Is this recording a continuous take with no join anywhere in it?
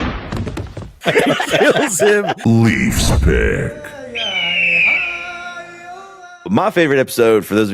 no; 2 cuts; at 1.0 s, 2.3 s

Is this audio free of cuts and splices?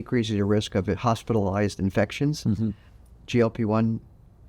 yes; 0 cuts

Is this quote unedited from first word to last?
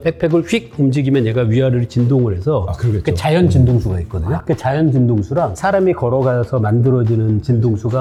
yes; 0 cuts

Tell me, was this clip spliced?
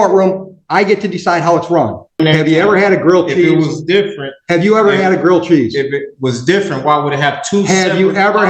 yes; 1 cut; at 2.2 s

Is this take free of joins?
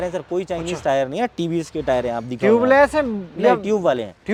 yes; 0 cuts

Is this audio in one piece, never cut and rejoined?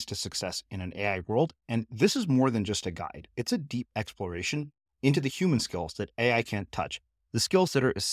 yes; 0 cuts

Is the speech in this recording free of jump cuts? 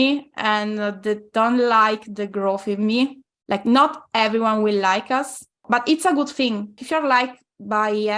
no; 3 cuts; at 3.3 s, 5.6 s, 6.8 s

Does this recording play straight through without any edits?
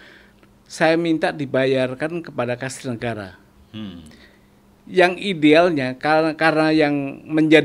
yes; 0 cuts

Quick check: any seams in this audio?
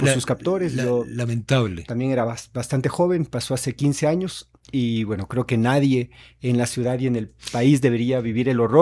no; 0 cuts

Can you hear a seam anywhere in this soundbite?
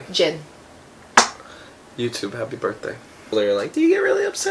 yes; 1 cut; at 3.3 s

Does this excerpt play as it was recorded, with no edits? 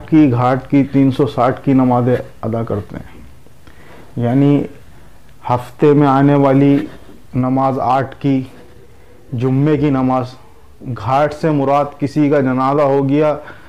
yes; 0 cuts

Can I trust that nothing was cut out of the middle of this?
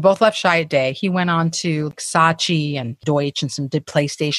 no; 2 cuts; at 1.9 s, 3.0 s

